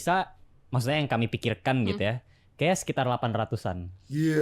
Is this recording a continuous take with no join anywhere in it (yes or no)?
yes